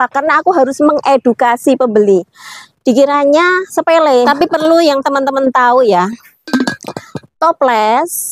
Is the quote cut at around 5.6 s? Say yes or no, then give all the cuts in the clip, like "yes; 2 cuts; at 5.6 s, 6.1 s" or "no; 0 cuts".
no; 1 cut; at 4.3 s